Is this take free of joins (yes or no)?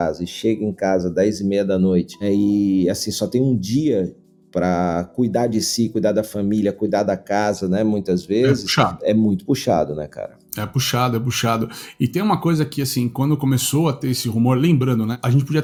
yes